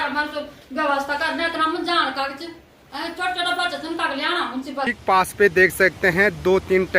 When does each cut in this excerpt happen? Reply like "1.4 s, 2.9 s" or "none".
5.0 s